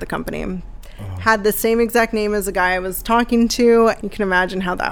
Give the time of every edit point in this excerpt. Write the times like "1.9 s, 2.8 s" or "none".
4.0 s